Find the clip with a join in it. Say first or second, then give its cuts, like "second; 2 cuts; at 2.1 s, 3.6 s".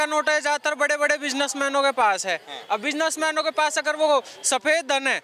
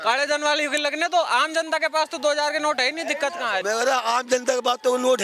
second; 1 cut; at 3.6 s